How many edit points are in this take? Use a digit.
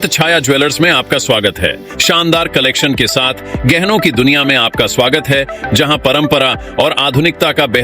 1